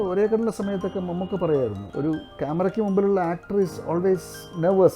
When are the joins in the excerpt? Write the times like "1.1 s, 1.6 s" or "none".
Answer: 1.8 s